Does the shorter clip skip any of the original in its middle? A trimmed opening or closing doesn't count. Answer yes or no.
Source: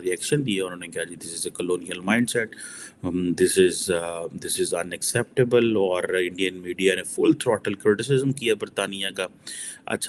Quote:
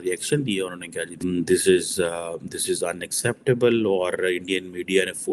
yes